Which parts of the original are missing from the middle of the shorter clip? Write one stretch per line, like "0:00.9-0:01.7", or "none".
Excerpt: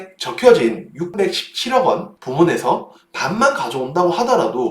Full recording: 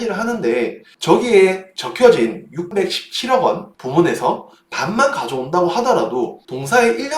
none